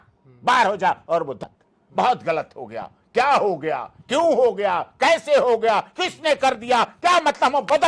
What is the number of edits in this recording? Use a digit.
1